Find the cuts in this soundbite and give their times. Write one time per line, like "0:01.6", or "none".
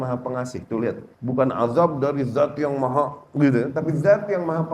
0:01.1